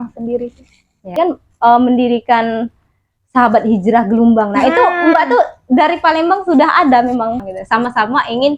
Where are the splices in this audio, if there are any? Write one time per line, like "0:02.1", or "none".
0:01.2
0:07.5